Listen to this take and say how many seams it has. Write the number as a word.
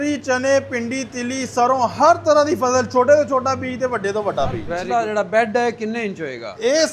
one